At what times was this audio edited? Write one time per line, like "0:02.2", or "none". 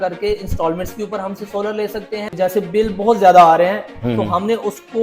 0:02.3